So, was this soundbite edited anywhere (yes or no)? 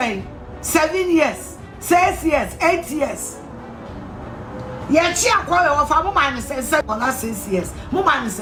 no